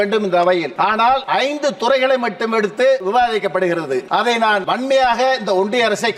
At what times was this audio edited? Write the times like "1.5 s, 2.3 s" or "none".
1.1 s, 3.0 s, 4.5 s